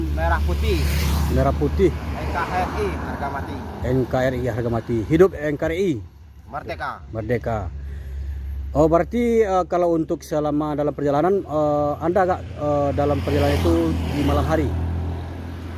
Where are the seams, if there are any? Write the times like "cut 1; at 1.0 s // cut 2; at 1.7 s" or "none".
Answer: none

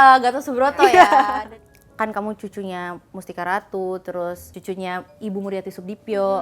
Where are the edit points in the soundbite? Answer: cut 1; at 1.5 s // cut 2; at 4.5 s

